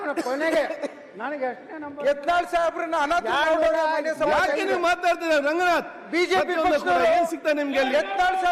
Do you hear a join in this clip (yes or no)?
no